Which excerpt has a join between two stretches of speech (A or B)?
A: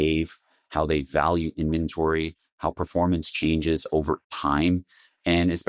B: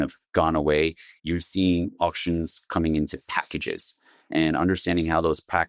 A